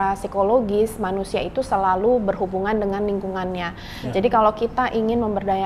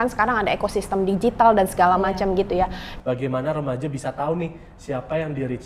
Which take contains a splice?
second; 1 cut; at 2.9 s

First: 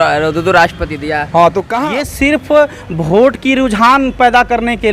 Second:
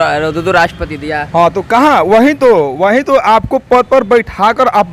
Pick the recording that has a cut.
first; 1 cut; at 1.7 s

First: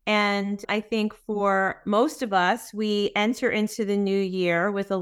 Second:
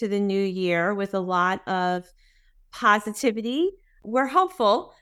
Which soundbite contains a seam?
second; 1 cut; at 4.0 s

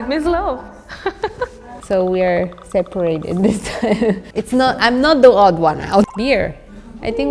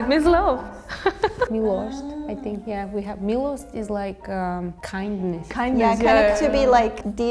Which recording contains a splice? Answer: first; 3 cuts; at 1.5 s, 4.2 s, 6.1 s

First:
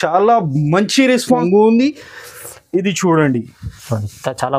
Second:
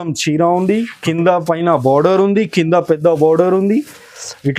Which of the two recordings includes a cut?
first; 1 cut; at 1.4 s

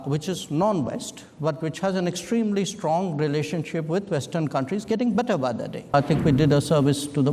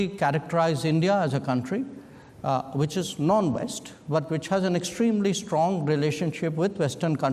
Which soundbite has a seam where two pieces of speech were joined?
first; 1 cut; at 5.9 s

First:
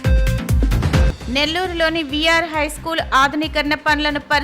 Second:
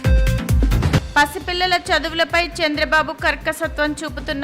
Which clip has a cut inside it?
first; 1 cut; at 1.0 s

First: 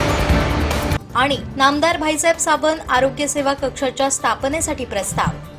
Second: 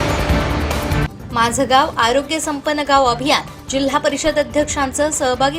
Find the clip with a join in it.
second; 1 cut; at 0.9 s

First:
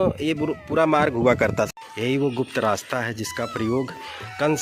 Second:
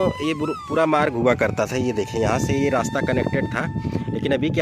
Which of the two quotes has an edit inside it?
first; 1 cut; at 1.7 s

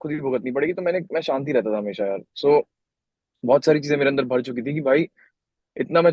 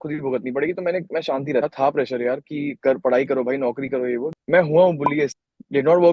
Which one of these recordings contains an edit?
second; 3 cuts; at 1.6 s, 4.3 s, 5.3 s

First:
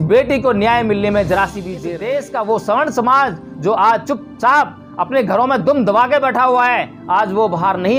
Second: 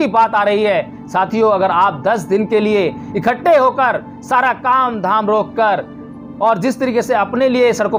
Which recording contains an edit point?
first; 1 cut; at 1.7 s

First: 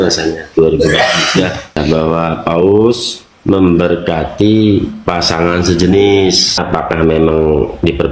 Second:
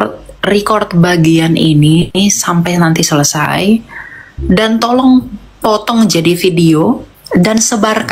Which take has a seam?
first; 2 cuts; at 1.8 s, 6.6 s

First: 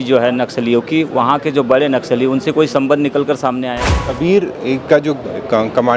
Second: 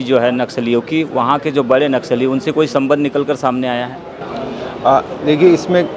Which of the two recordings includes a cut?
first; 1 cut; at 4.2 s

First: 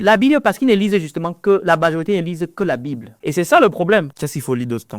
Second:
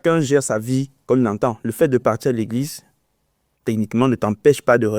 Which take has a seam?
first; 2 cuts; at 3.1 s, 4.2 s

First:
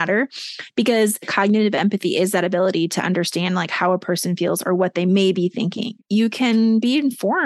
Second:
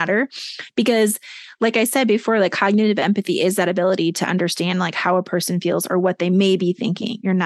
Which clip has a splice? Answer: first; 2 cuts; at 1.3 s, 5.9 s

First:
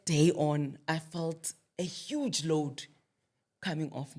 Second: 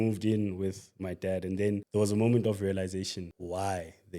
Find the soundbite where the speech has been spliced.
second; 2 cuts; at 1.9 s, 3.3 s

